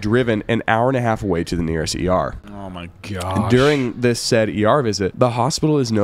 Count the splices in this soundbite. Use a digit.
1